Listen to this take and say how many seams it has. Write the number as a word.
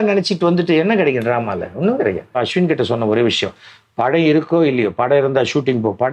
one